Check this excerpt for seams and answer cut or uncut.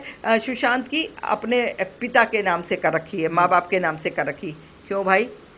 uncut